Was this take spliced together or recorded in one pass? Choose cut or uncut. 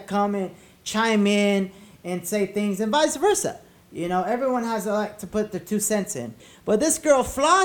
cut